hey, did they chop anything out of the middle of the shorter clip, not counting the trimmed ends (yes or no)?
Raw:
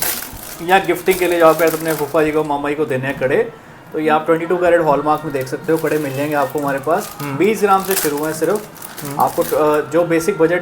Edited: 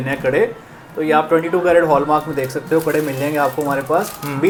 no